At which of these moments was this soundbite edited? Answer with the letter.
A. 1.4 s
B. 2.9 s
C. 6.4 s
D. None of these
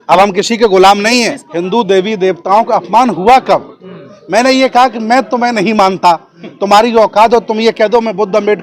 A